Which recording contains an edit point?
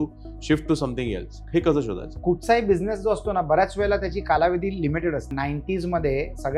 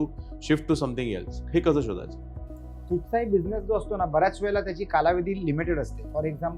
first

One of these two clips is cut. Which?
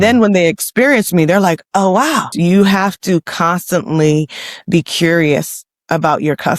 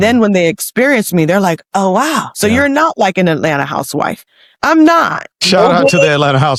first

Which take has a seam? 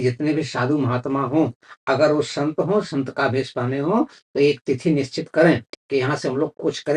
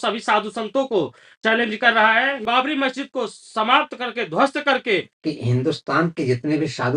second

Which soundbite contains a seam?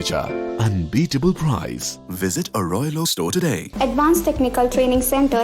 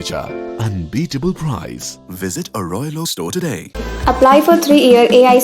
first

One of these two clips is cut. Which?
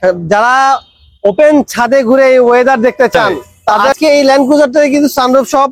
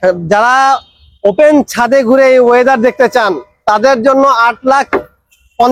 first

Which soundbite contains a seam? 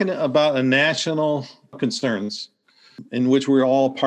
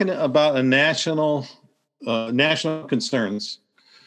first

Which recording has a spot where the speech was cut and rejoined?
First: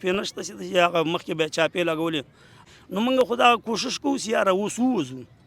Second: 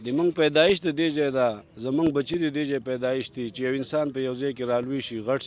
first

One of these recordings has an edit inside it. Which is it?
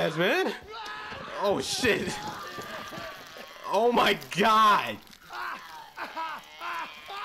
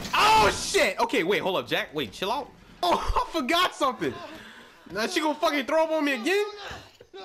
second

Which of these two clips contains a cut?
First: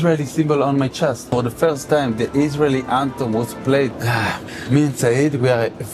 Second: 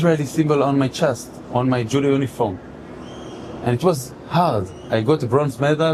first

